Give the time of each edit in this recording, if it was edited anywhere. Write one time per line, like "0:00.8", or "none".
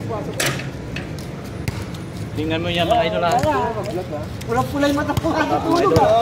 none